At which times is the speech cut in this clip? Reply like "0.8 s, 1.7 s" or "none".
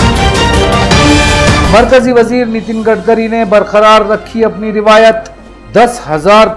1.7 s